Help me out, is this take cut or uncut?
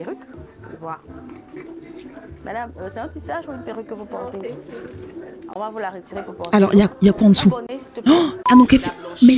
cut